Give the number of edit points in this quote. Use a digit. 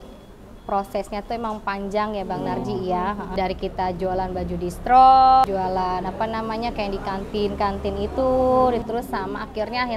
3